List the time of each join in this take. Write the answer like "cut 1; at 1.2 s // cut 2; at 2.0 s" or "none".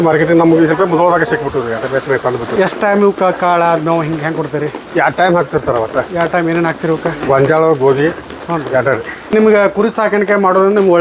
cut 1; at 2.5 s // cut 2; at 9.3 s